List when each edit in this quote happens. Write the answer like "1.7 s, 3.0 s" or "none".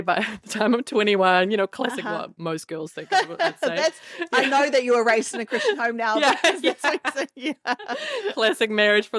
none